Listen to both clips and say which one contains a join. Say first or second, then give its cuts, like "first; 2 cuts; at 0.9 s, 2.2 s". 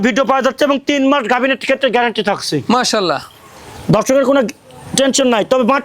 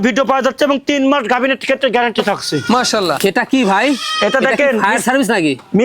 second; 1 cut; at 3.2 s